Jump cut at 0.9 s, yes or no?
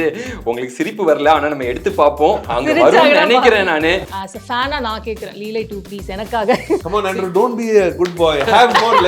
no